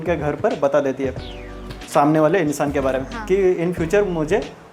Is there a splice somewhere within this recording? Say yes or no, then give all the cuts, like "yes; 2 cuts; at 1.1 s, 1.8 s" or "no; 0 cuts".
no; 0 cuts